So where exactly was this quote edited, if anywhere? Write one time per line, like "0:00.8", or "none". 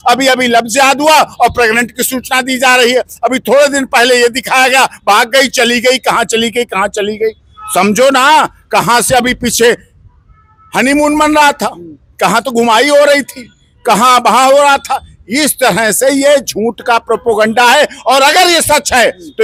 none